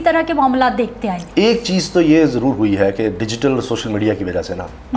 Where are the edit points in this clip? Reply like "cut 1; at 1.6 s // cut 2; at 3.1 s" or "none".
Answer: cut 1; at 1.2 s